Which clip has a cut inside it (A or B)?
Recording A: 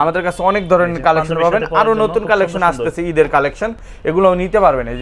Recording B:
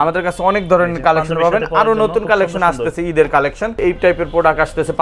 B